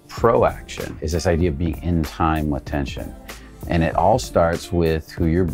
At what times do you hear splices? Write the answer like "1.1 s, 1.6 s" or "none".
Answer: 1.0 s